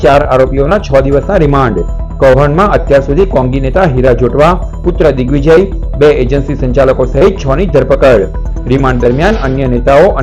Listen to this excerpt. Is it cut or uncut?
uncut